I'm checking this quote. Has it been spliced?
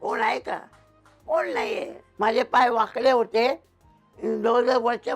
yes; 1 cut; at 2.0 s

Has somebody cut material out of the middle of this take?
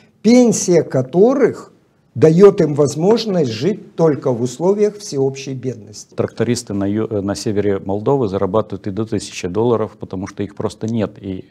yes; 1 cut; at 6.1 s

